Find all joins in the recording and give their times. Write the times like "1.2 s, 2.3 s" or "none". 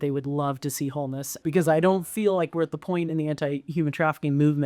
1.4 s